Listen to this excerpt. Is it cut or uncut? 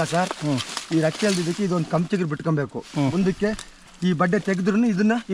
uncut